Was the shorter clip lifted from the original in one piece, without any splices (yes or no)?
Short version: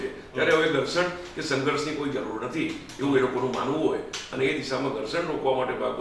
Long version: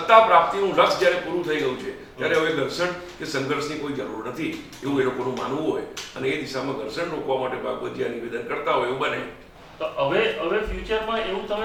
yes